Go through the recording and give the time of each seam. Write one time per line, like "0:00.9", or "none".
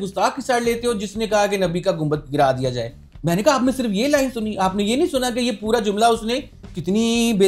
none

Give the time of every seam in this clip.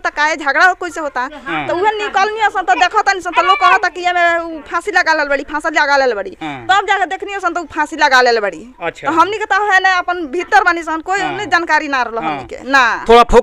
none

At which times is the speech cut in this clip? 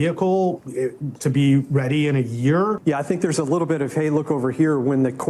0:02.8

